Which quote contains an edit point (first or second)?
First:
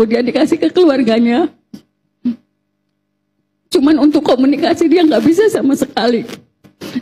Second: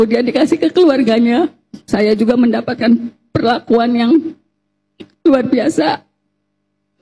second